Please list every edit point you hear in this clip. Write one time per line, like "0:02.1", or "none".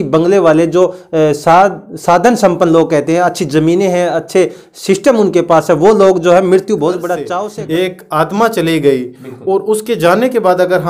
0:07.2